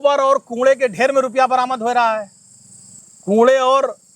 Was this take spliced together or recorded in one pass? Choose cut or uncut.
uncut